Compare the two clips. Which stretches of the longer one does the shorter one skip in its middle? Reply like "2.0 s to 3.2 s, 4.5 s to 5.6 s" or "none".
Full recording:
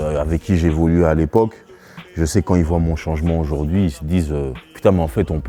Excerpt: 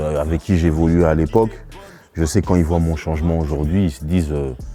none